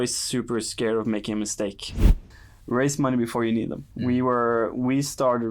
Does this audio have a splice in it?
yes; 1 cut; at 2.2 s

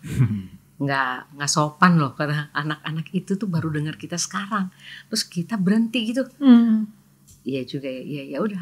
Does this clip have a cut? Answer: no; 0 cuts

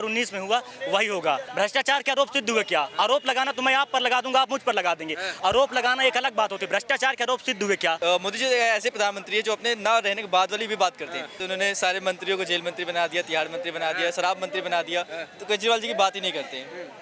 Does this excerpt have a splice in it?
yes; 3 cuts; at 1.5 s, 8.0 s, 11.4 s

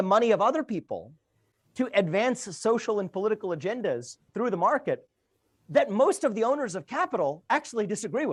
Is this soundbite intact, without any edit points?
yes; 0 cuts

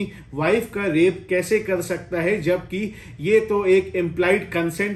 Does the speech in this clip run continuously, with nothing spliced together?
yes; 0 cuts

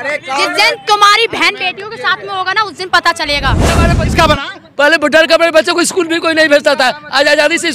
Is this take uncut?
no; 1 cut; at 3.9 s

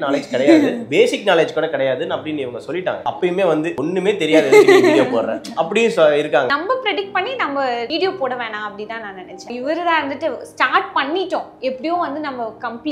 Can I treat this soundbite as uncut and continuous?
no; 5 cuts; at 3.0 s, 3.7 s, 6.5 s, 7.9 s, 9.5 s

